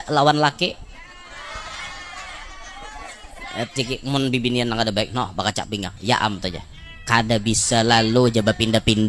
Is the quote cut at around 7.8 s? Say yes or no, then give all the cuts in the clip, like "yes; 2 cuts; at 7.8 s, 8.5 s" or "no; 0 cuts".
no; 1 cut; at 3.9 s